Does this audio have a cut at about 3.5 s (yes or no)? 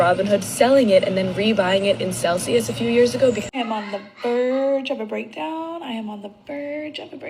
yes